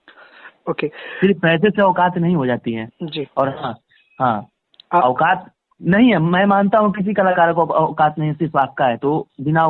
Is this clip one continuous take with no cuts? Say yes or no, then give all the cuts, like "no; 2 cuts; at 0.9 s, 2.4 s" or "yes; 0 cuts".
yes; 0 cuts